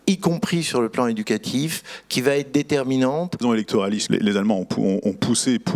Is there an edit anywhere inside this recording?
yes; 1 cut; at 3.7 s

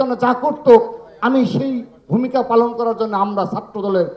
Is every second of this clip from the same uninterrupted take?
yes; 0 cuts

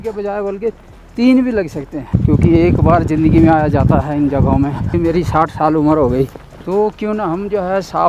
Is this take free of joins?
no; 3 cuts; at 2.1 s, 4.9 s, 6.3 s

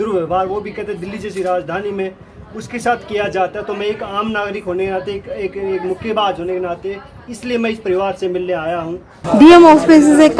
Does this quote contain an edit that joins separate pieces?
yes; 1 cut; at 9.2 s

